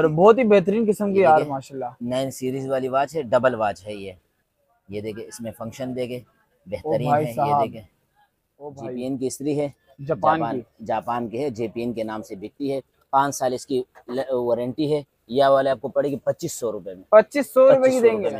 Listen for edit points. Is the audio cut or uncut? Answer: cut